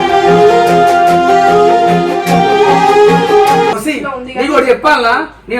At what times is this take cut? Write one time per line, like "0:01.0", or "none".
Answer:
0:03.8